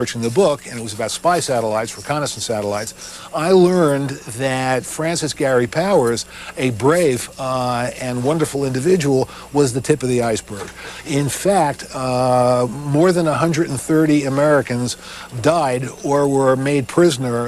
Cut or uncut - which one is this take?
cut